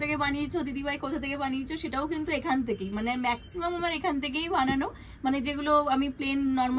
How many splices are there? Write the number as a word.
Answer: zero